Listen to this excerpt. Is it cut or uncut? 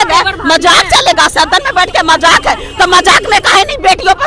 uncut